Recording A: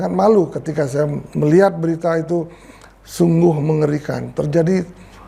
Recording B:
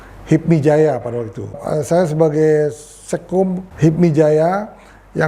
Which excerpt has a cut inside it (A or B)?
B